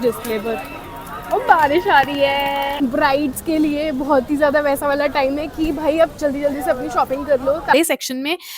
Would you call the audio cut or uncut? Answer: cut